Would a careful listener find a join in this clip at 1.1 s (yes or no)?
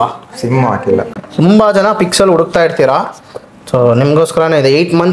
yes